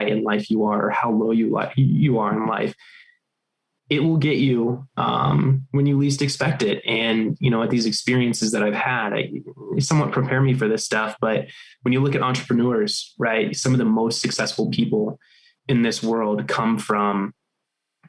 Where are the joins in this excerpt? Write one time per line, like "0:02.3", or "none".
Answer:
none